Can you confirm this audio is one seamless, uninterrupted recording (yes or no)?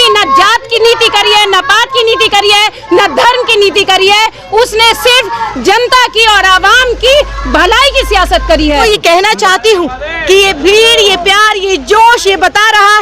no